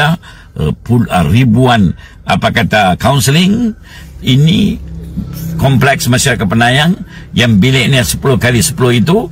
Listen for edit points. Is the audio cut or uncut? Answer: uncut